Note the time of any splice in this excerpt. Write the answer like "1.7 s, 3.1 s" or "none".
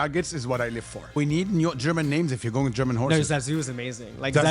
1.1 s